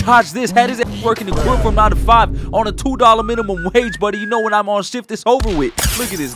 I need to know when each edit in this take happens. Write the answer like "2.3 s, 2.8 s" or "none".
none